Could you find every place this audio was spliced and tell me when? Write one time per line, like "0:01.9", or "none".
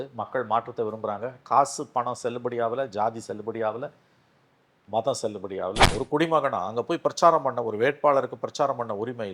0:05.8